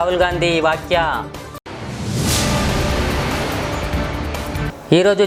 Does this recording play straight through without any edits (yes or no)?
yes